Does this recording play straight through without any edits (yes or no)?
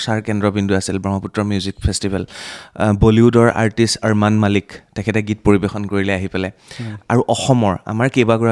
yes